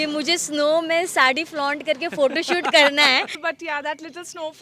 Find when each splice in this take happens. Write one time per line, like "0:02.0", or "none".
0:03.3